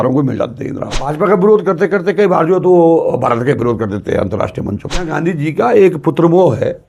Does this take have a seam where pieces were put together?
yes; 2 cuts; at 1.1 s, 5.1 s

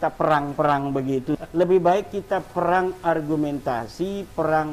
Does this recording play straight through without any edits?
no; 1 cut; at 1.4 s

